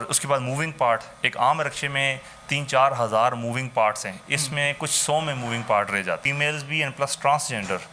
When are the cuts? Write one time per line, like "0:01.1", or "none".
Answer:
0:06.3